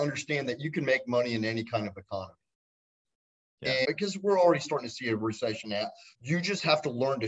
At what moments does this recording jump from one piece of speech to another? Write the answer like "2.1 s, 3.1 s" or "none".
3.8 s, 6.1 s